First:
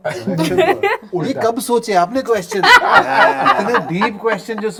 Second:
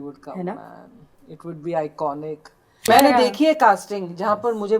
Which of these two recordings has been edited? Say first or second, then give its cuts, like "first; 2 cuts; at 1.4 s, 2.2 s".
second; 1 cut; at 2.8 s